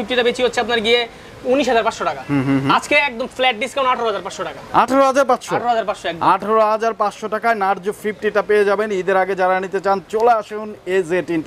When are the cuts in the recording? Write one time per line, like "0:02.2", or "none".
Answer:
none